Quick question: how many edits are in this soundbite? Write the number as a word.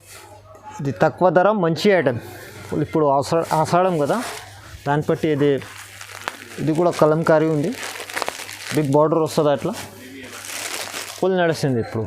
one